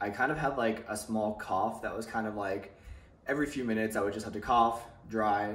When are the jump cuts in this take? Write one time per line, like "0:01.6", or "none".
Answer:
none